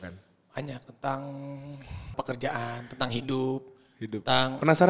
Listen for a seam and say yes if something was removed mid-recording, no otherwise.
yes